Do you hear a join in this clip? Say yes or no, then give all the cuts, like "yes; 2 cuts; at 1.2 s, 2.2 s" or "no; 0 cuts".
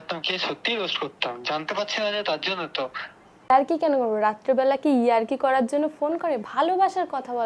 yes; 1 cut; at 3.5 s